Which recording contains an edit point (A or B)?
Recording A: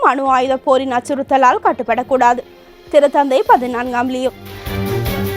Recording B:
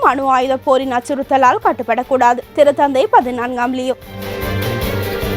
B